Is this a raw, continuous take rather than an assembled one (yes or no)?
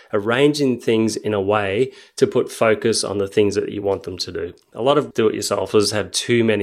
no